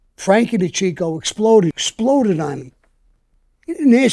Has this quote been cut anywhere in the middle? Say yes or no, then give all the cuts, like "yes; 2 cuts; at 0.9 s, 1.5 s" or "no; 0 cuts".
yes; 1 cut; at 1.8 s